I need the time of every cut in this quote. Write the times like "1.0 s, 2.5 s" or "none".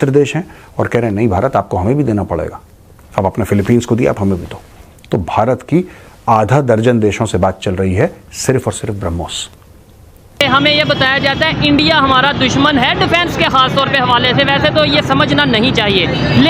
10.4 s